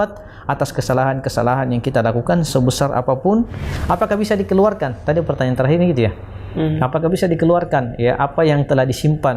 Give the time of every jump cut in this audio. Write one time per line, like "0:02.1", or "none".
0:03.6